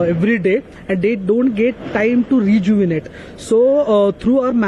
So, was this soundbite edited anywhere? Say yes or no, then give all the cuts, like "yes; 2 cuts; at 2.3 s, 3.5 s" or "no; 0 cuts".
no; 0 cuts